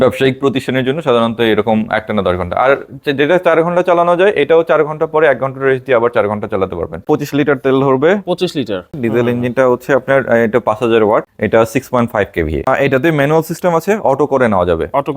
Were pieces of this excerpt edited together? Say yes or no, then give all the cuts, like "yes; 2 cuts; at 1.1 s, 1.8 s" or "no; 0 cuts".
yes; 4 cuts; at 7.0 s, 9.0 s, 11.3 s, 12.7 s